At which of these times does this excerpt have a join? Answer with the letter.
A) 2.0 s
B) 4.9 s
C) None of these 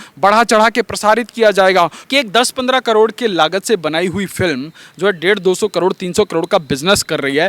A